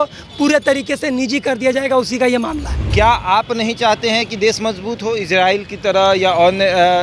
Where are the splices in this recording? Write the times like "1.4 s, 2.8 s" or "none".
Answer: 2.9 s